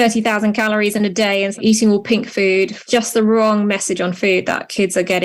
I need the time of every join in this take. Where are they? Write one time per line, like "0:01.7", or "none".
0:01.6
0:02.8